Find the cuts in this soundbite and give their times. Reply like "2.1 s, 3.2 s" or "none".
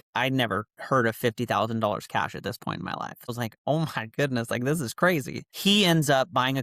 3.3 s